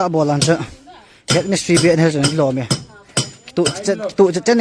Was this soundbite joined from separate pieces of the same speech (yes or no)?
no